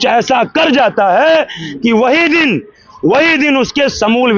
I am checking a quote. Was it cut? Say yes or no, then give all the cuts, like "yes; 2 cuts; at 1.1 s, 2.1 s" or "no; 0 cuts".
no; 0 cuts